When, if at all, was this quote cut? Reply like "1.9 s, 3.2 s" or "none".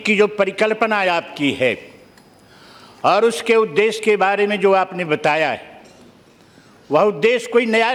none